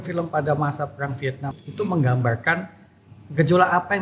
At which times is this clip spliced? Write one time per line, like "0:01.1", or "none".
0:01.6